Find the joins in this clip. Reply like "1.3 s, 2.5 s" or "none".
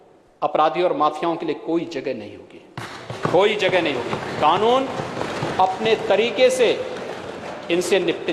none